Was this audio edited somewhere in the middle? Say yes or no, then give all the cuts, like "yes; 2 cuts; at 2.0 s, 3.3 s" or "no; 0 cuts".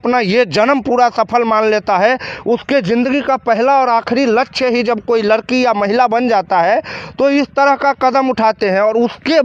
no; 0 cuts